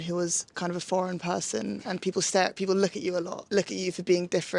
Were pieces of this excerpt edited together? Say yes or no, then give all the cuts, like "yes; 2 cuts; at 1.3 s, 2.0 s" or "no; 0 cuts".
yes; 1 cut; at 3.4 s